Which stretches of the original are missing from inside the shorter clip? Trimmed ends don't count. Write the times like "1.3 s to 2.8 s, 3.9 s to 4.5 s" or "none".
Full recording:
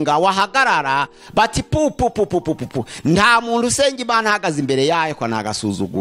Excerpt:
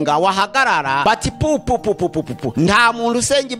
1.0 s to 1.3 s, 2.8 s to 2.9 s